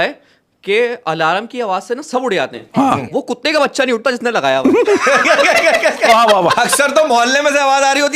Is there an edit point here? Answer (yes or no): no